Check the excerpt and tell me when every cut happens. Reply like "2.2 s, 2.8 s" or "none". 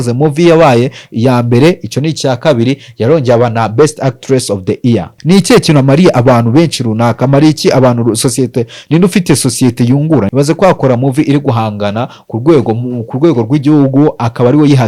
5.1 s, 10.3 s

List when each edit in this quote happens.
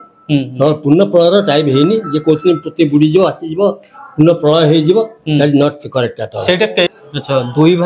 6.9 s

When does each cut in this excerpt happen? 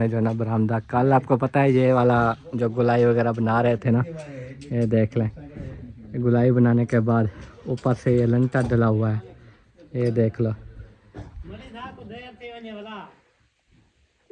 none

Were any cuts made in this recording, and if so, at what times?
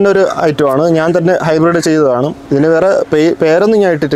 2.4 s

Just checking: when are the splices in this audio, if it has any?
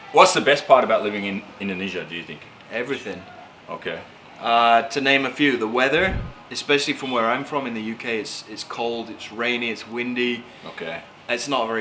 none

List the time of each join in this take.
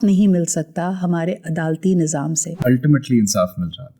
2.5 s

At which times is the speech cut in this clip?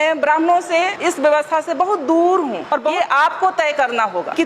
2.9 s

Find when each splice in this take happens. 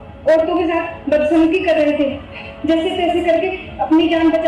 none

